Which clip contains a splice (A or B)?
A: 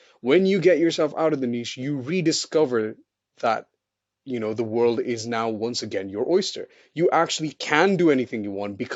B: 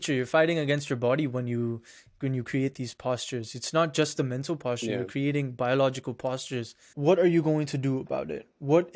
B